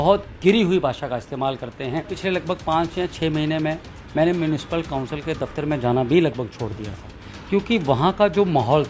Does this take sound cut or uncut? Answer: cut